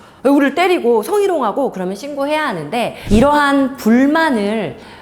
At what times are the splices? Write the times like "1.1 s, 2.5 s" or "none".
3.0 s